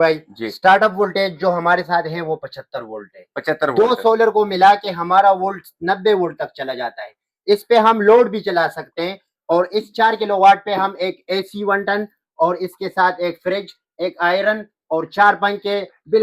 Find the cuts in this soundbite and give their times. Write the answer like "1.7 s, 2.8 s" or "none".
none